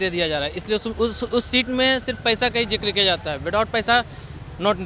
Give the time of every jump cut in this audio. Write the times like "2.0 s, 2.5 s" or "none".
none